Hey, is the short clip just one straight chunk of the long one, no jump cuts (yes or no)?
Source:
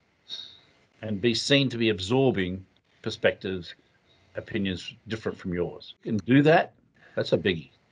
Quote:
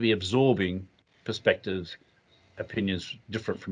yes